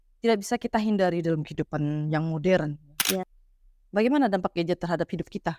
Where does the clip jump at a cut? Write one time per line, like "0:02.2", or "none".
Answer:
0:03.4